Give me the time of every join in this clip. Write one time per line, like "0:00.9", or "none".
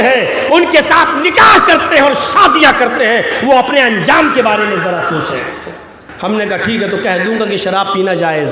0:06.1